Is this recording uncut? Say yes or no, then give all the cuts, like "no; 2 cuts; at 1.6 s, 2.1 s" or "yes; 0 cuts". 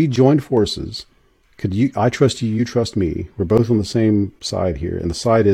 yes; 0 cuts